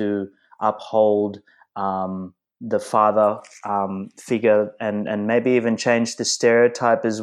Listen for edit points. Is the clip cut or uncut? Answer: uncut